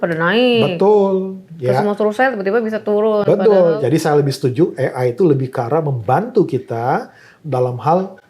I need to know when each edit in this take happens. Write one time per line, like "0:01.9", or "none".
0:03.8